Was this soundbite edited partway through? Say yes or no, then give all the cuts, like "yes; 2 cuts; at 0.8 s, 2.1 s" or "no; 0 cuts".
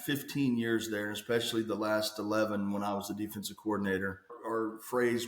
yes; 1 cut; at 4.4 s